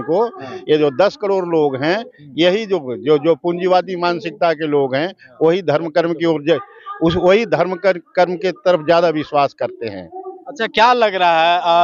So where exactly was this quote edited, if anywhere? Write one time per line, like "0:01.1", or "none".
none